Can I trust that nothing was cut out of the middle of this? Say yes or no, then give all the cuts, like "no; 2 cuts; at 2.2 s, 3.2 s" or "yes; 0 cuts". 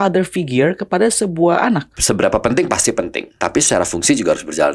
no; 2 cuts; at 1.9 s, 3.3 s